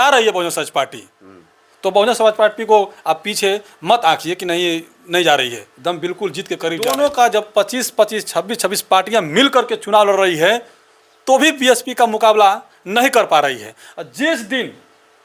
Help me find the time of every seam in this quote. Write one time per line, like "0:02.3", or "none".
0:06.8